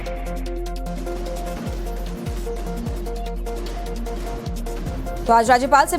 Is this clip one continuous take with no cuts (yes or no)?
no